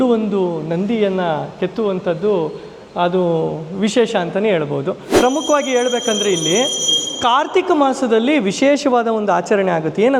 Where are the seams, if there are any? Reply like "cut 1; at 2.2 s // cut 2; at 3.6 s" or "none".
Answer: cut 1; at 5.1 s